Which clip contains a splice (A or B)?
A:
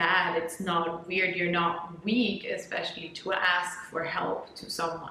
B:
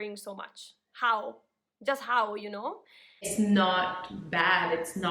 B